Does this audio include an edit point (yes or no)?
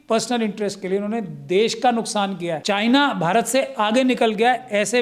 yes